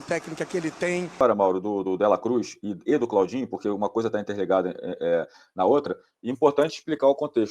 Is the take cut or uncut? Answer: cut